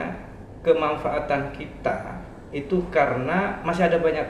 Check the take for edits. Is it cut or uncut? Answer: uncut